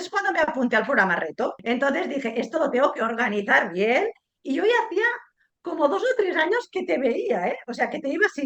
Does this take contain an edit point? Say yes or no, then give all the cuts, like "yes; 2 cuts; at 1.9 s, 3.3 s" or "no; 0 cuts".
yes; 1 cut; at 1.6 s